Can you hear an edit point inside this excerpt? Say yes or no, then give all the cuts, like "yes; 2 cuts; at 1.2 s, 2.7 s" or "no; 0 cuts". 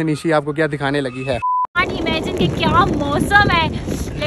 yes; 1 cut; at 1.8 s